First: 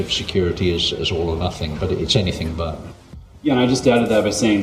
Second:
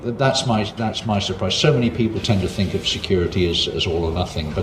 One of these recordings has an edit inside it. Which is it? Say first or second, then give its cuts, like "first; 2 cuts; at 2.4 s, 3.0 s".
first; 1 cut; at 2.8 s